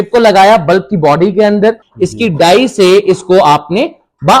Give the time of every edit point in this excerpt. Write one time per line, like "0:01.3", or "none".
0:01.9